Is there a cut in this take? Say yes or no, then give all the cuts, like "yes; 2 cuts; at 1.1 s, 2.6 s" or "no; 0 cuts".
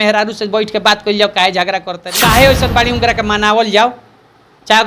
yes; 1 cut; at 2.0 s